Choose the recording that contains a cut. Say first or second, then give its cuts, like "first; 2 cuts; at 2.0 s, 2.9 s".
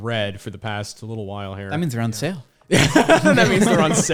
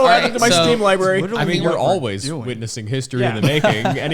second; 1 cut; at 1.3 s